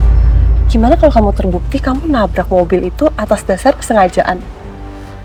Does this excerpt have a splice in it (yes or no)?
no